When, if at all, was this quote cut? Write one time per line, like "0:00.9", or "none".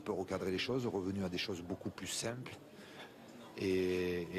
none